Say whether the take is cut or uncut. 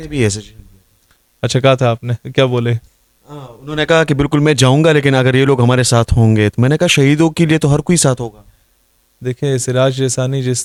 uncut